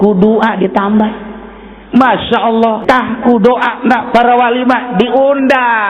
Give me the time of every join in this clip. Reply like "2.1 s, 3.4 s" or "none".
2.8 s